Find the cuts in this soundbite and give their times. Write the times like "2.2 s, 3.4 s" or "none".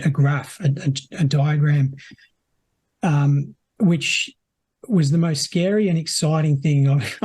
none